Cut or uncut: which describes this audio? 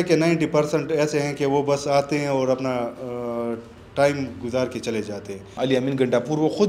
cut